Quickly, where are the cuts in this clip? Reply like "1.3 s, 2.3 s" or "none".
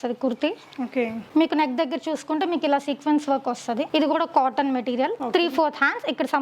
3.9 s, 5.2 s